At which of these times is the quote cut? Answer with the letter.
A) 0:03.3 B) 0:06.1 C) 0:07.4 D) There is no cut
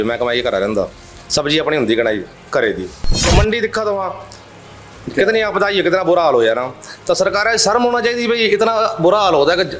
A